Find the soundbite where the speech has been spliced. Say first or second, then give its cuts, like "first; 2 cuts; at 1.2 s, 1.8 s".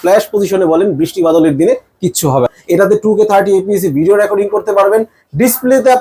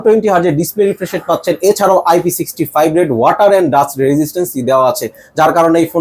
first; 1 cut; at 2.6 s